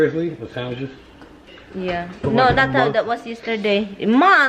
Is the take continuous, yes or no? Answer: yes